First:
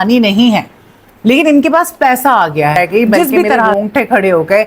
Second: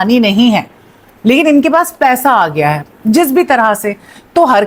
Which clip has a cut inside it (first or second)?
first